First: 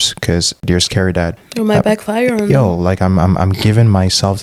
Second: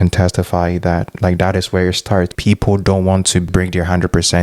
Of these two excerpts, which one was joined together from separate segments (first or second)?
second